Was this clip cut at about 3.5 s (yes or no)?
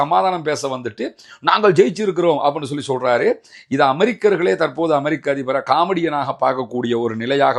no